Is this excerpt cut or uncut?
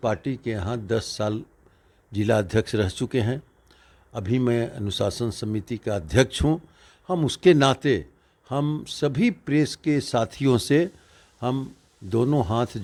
uncut